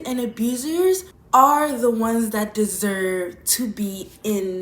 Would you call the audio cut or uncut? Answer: cut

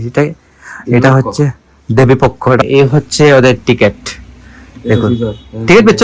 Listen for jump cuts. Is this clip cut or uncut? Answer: cut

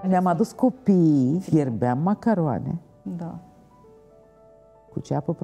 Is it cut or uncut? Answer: cut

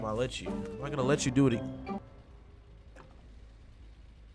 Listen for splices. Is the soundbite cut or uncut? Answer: uncut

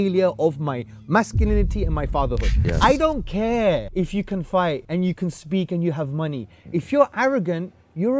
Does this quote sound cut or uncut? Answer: cut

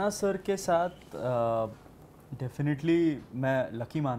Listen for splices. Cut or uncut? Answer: uncut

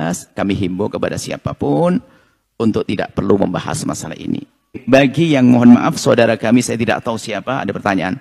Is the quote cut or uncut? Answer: cut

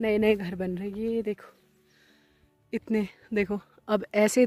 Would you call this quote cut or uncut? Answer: uncut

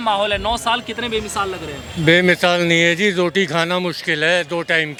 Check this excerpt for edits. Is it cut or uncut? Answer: uncut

